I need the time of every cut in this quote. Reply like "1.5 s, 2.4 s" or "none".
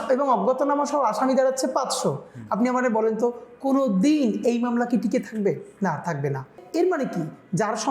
6.6 s

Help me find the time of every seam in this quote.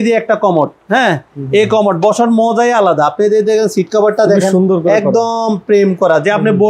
none

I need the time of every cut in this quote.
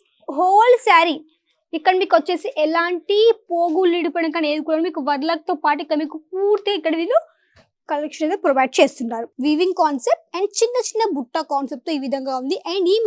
9.2 s

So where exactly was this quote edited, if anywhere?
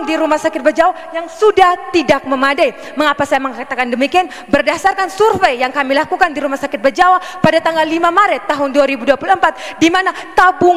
none

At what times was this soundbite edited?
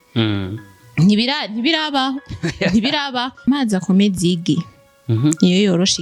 3.5 s

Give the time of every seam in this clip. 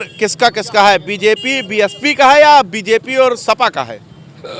none

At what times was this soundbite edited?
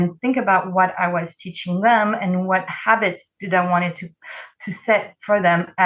none

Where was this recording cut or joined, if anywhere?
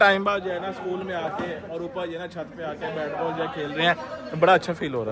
none

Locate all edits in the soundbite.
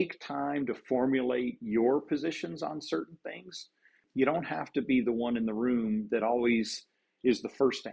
4.0 s

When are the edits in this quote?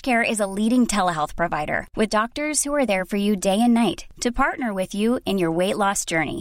none

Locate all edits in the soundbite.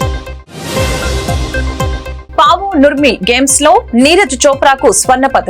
none

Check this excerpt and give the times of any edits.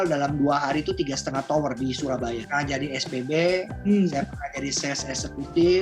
2.4 s

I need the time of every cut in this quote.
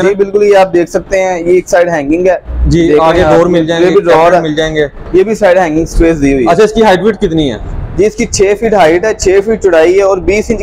none

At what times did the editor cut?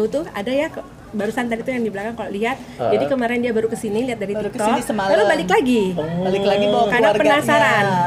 none

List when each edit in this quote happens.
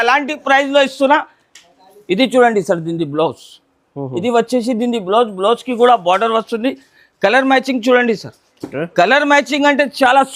none

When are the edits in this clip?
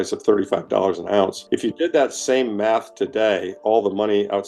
1.4 s

